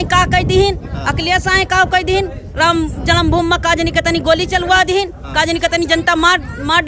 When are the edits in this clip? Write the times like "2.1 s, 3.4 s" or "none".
none